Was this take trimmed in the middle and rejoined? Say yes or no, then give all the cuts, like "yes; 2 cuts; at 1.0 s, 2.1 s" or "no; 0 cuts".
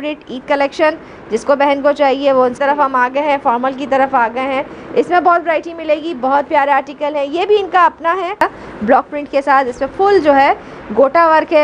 yes; 2 cuts; at 2.5 s, 8.4 s